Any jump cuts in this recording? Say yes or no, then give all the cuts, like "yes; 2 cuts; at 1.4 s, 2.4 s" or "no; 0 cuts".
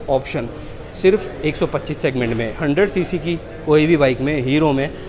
no; 0 cuts